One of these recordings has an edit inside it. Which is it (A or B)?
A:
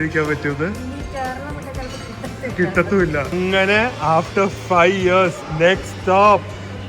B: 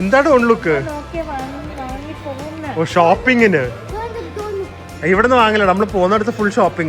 A